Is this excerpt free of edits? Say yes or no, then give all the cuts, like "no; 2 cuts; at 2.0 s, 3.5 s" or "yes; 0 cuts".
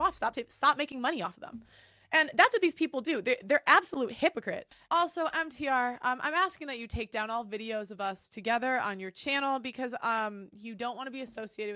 no; 1 cut; at 4.7 s